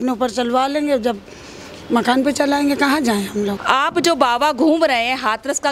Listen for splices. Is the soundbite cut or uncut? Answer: cut